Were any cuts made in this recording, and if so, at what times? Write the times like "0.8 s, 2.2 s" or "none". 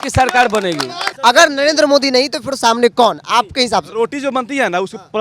1.1 s